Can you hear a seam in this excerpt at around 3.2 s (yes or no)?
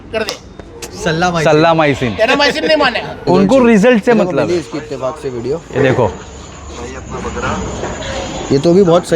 yes